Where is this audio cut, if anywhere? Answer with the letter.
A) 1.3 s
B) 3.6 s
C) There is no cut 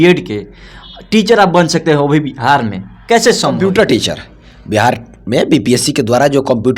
B